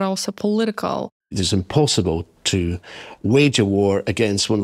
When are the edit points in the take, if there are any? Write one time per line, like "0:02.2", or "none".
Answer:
0:01.3